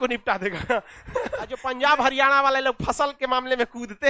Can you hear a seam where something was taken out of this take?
yes; 1 cut; at 1.5 s

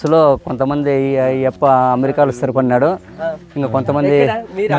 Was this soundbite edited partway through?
no; 0 cuts

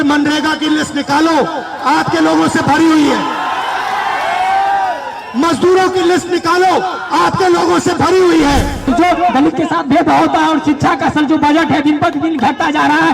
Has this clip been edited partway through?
yes; 1 cut; at 8.9 s

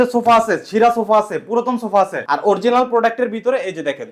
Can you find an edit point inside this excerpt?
yes; 1 cut; at 2.2 s

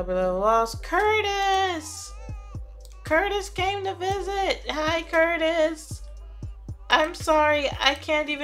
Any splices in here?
no; 0 cuts

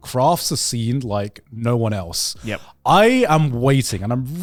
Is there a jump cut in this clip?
no; 0 cuts

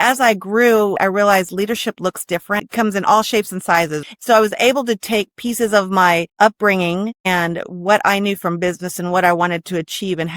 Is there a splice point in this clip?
yes; 5 cuts; at 1.0 s, 2.6 s, 4.0 s, 6.3 s, 7.2 s

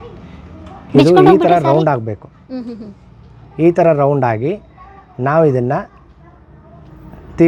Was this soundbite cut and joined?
no; 0 cuts

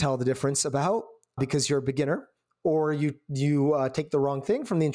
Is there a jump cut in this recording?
yes; 1 cut; at 1.4 s

